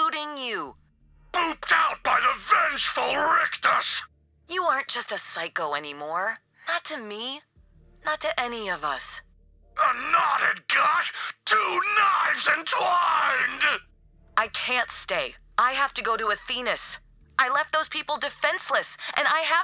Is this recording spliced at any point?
no; 0 cuts

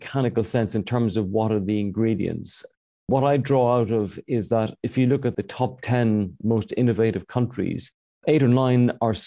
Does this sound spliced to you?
yes; 1 cut; at 5.4 s

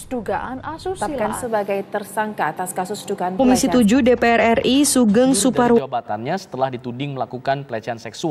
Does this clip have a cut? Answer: no; 0 cuts

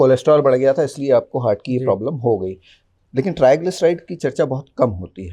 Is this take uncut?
yes; 0 cuts

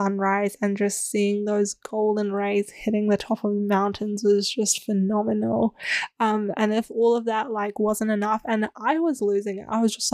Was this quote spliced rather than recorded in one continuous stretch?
no; 0 cuts

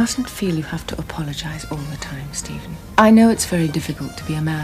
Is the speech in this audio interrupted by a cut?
yes; 1 cut; at 2.9 s

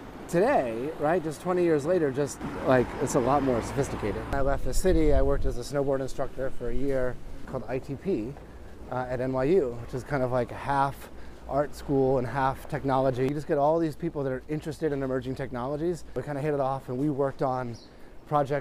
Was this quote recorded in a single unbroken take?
no; 4 cuts; at 4.3 s, 7.4 s, 13.3 s, 16.2 s

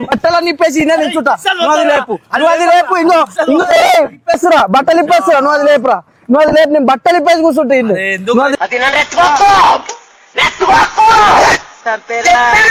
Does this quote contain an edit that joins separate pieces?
no; 0 cuts

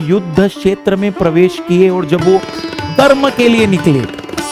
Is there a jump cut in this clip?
no; 0 cuts

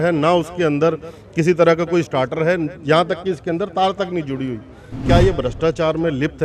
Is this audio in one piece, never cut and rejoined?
no; 1 cut; at 5.0 s

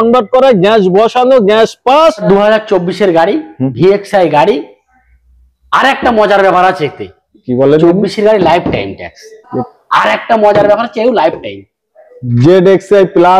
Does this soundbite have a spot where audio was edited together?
yes; 2 cuts; at 2.2 s, 9.5 s

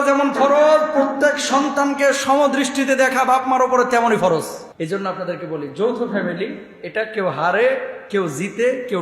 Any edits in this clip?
yes; 1 cut; at 4.6 s

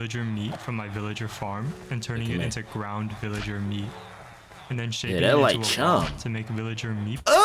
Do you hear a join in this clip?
no; 0 cuts

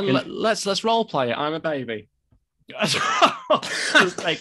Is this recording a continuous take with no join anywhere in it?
yes; 0 cuts

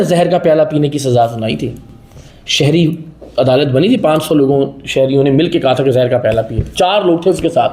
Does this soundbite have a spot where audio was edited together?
no; 0 cuts

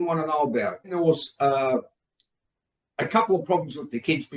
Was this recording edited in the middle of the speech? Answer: yes; 1 cut; at 0.9 s

